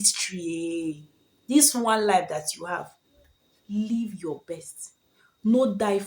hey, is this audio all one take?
yes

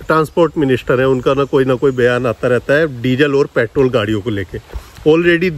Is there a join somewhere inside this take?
no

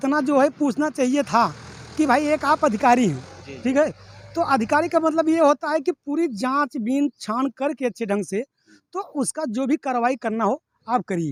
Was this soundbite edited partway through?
no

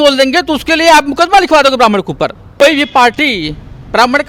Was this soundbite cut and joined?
yes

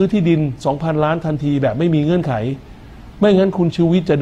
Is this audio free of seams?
yes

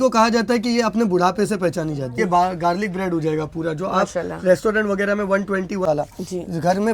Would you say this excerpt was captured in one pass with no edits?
no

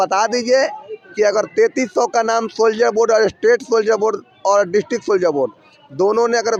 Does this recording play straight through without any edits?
yes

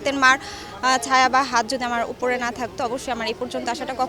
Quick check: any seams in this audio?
no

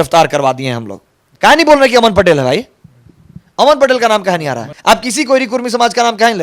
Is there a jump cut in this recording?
yes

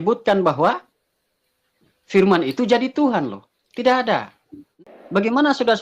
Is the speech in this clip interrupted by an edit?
yes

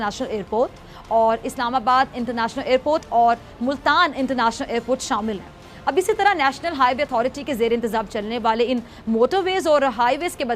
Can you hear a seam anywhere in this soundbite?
no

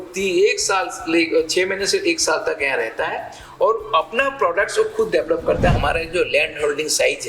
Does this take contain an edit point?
yes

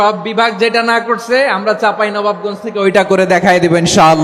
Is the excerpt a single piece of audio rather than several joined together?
yes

